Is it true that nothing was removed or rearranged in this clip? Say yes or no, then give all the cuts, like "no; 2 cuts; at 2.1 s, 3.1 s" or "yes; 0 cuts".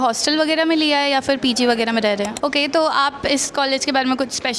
no; 1 cut; at 2.3 s